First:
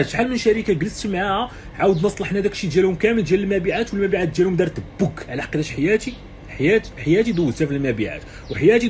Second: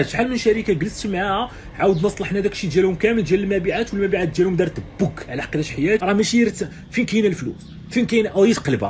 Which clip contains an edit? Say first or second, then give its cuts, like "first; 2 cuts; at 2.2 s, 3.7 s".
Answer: second; 1 cut; at 6.0 s